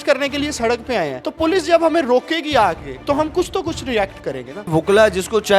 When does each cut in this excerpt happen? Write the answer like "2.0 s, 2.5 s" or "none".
1.2 s, 2.9 s, 4.7 s